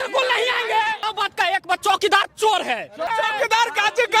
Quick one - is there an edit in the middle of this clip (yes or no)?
yes